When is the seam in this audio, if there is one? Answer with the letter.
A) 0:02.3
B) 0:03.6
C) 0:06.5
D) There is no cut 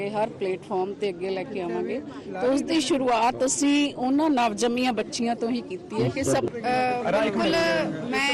C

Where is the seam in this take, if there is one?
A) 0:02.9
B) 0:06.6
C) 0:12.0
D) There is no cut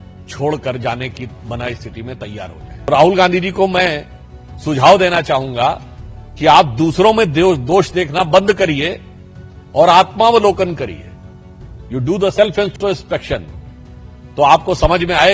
A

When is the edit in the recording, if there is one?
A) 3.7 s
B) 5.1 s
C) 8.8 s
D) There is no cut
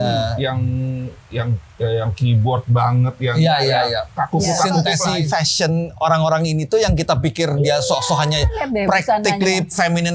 B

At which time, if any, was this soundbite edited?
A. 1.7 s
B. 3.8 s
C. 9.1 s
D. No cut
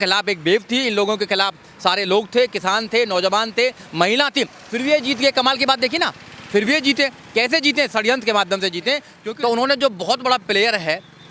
C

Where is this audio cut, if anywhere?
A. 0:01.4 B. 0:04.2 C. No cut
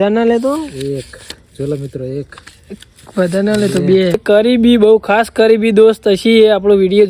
B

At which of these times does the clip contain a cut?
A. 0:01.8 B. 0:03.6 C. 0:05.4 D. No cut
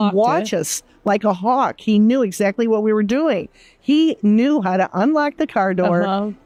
D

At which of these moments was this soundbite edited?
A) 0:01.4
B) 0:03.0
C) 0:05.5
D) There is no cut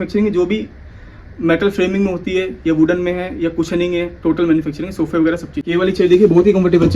C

